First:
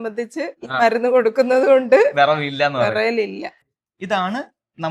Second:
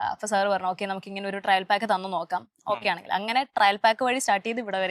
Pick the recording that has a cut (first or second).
first